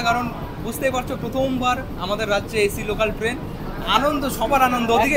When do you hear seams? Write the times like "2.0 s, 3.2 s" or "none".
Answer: none